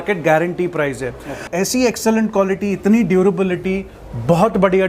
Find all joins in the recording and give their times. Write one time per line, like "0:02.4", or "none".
0:01.4

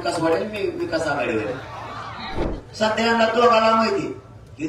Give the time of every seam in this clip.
0:02.6

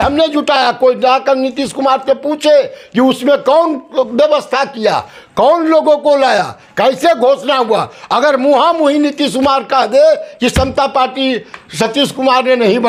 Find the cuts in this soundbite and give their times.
none

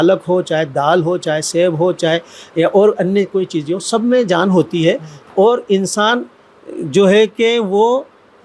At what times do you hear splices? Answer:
none

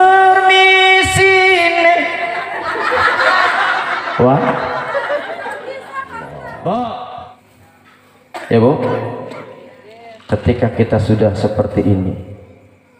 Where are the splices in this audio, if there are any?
0:07.2

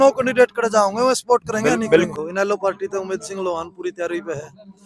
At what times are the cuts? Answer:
0:02.1

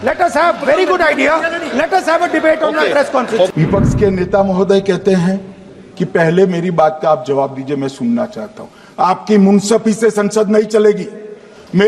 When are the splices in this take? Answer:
0:03.5

